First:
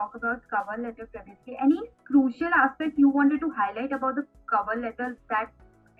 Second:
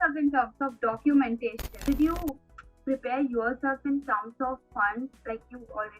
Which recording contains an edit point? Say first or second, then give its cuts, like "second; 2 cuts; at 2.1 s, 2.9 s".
second; 1 cut; at 1.8 s